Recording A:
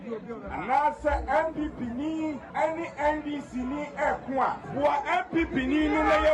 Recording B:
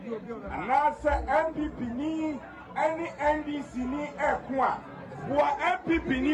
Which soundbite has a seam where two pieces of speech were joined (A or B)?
A